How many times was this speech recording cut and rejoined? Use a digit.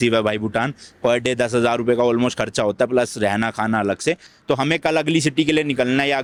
0